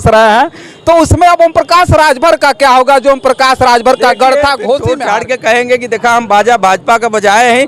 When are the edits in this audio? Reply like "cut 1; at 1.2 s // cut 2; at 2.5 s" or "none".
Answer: cut 1; at 4.9 s